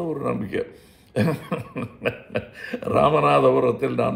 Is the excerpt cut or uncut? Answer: uncut